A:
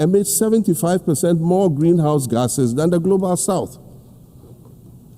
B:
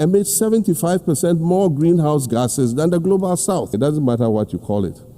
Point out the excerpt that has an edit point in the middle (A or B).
B